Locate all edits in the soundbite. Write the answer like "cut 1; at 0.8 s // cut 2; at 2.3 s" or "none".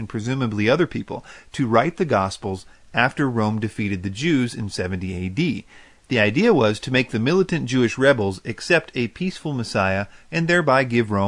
cut 1; at 8.4 s